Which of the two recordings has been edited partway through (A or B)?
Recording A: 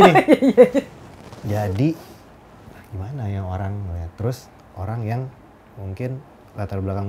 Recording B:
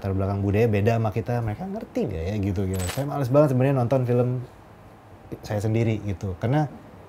B